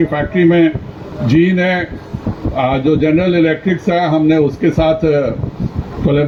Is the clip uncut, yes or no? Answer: yes